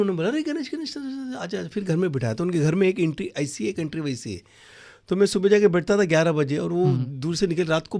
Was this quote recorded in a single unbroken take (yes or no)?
yes